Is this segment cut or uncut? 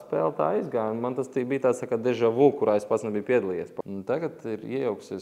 cut